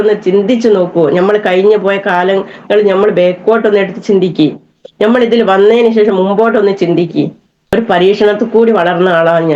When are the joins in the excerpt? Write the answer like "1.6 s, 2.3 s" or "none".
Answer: 7.6 s